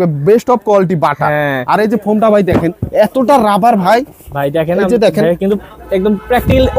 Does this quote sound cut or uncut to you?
uncut